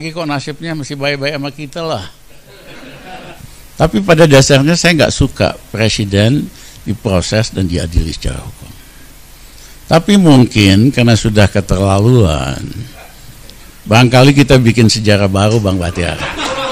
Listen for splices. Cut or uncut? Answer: cut